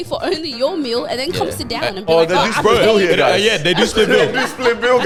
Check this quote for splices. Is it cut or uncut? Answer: uncut